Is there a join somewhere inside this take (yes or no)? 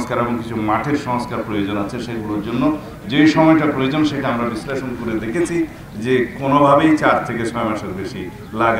no